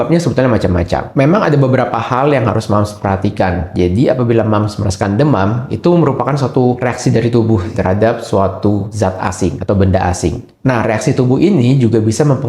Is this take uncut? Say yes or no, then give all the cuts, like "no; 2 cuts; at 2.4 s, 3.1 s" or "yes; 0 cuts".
no; 4 cuts; at 1.1 s, 6.8 s, 7.7 s, 9.2 s